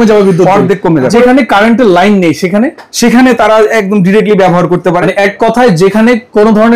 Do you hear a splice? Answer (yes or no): yes